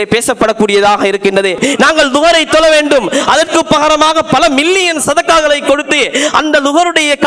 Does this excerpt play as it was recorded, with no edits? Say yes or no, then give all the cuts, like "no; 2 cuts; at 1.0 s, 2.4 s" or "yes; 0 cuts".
no; 1 cut; at 1.6 s